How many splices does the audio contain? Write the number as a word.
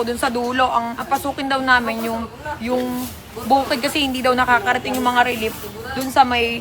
zero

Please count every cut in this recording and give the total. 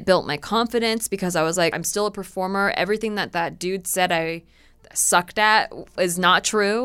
one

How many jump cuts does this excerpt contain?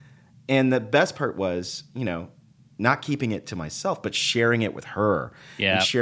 zero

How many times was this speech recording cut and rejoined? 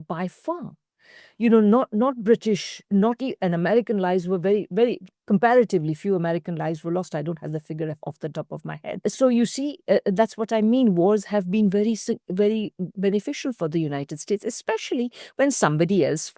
one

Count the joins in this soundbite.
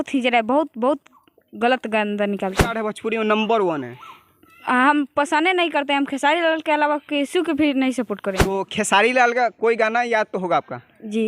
two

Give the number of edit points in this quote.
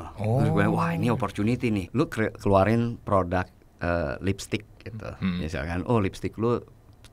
one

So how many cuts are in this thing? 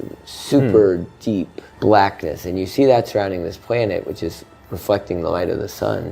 one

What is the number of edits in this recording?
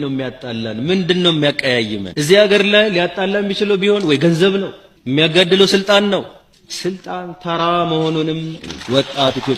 one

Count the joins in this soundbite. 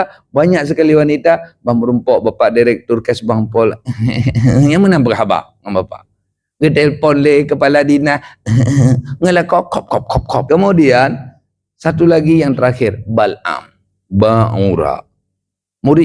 one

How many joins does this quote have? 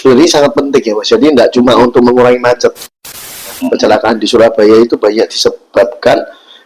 one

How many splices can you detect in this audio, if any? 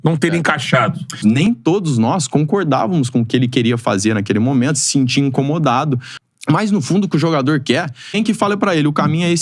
three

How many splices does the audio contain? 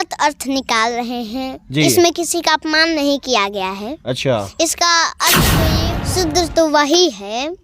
one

